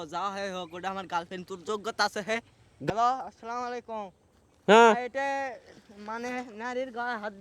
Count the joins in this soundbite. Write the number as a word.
one